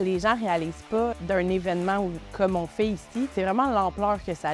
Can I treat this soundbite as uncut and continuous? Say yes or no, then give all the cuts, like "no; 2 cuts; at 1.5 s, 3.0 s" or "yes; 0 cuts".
no; 3 cuts; at 1.1 s, 2.2 s, 3.3 s